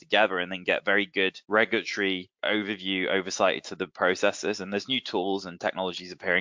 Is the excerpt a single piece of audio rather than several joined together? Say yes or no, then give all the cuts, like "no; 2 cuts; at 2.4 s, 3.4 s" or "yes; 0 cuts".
no; 2 cuts; at 1.4 s, 2.3 s